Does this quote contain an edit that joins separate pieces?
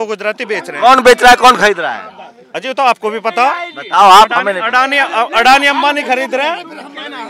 no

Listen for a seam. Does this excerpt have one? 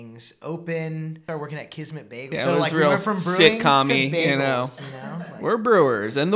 yes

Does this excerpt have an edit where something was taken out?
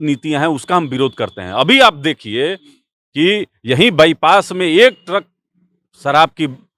no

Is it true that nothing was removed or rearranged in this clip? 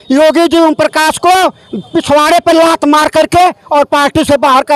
yes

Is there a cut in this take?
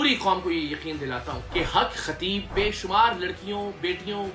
yes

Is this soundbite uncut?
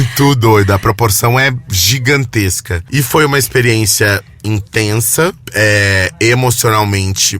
no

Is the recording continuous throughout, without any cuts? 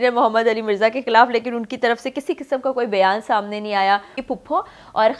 no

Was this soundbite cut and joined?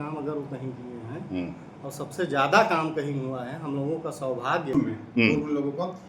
yes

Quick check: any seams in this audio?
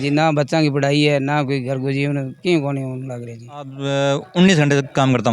yes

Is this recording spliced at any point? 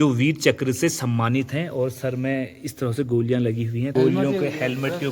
yes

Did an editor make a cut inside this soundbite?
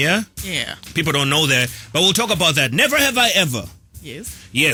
no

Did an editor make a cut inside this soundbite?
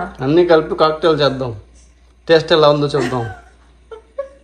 no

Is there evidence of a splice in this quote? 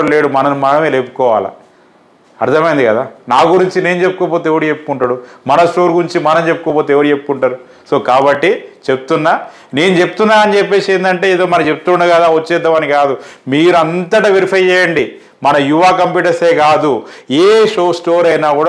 no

